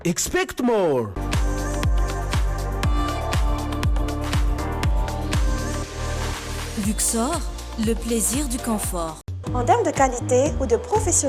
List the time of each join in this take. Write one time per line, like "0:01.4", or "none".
none